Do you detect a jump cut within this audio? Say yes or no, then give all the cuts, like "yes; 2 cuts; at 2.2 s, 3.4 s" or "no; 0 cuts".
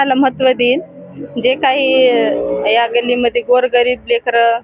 no; 0 cuts